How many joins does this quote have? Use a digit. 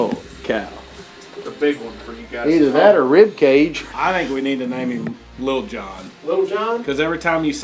2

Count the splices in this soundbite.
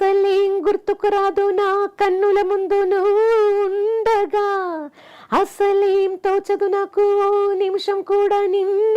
0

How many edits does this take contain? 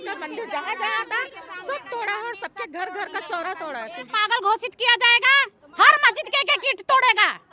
1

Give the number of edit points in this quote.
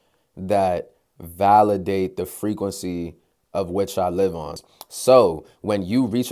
1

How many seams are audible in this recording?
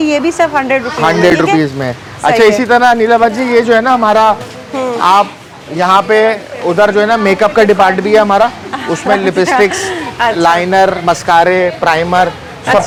0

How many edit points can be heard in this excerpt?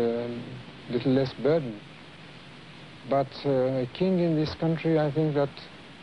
1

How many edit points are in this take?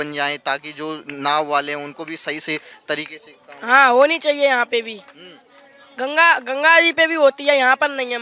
0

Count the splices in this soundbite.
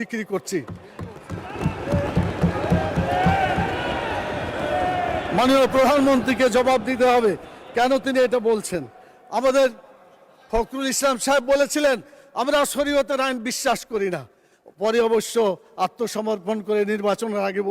0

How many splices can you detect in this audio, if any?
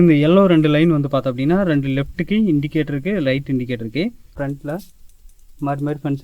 1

